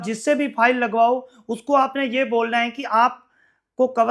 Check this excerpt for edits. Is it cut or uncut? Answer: uncut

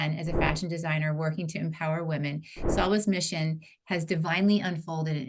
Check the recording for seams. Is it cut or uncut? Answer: uncut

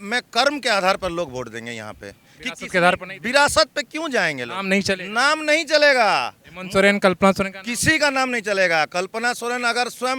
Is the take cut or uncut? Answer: uncut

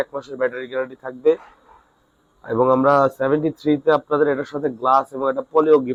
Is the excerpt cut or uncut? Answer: uncut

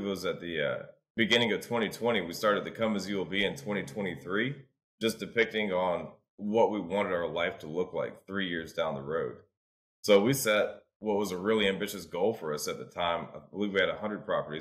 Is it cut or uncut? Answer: cut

